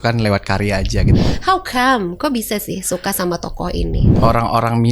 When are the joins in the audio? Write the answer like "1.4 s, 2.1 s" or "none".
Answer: 1.1 s, 4.1 s